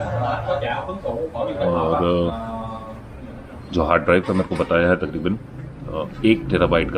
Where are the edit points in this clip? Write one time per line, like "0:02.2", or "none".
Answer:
none